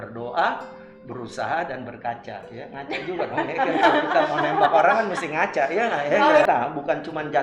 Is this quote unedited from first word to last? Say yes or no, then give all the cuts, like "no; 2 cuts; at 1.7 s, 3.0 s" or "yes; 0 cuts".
no; 1 cut; at 6.4 s